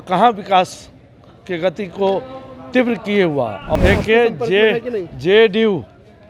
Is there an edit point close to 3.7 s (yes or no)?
yes